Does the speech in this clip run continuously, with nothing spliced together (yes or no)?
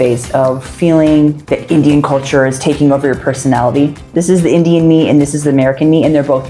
no